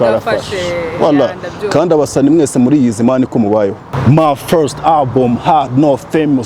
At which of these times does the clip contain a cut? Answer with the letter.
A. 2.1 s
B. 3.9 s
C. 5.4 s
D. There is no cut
B